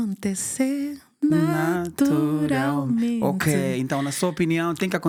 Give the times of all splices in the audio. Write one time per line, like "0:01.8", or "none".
none